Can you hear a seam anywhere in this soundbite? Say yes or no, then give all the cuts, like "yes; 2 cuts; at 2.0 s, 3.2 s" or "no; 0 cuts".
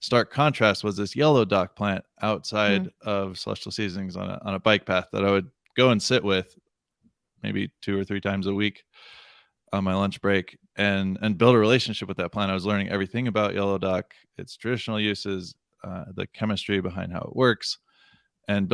no; 0 cuts